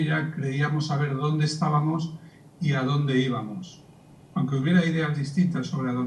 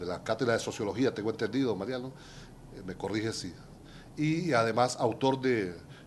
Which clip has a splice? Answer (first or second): second